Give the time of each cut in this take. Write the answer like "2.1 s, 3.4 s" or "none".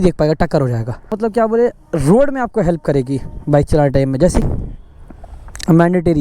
1.1 s, 4.5 s